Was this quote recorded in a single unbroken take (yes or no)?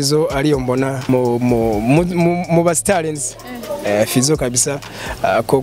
no